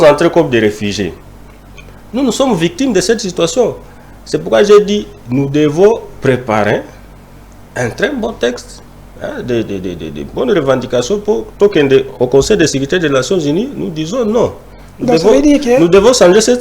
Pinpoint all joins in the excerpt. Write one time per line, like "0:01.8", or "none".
none